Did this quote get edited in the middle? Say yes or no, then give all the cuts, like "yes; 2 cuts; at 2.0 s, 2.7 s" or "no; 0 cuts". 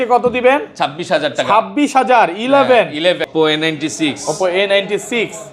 yes; 1 cut; at 3.3 s